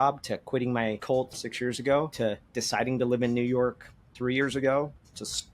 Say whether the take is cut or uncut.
cut